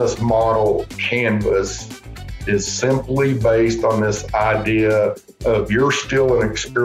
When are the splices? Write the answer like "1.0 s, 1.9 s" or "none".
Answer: 1.0 s